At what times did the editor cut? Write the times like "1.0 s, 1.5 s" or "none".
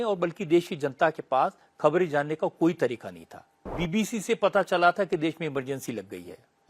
3.7 s